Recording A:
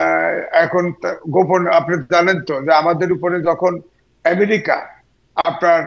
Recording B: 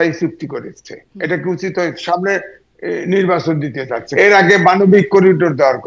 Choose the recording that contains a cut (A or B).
B